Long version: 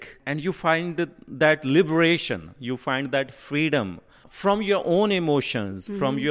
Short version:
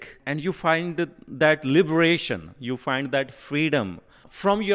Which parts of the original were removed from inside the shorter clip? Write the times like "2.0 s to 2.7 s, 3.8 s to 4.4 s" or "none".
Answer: none